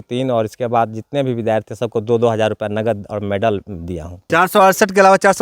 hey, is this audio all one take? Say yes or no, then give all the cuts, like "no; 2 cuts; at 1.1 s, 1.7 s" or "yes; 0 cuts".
no; 1 cut; at 4.2 s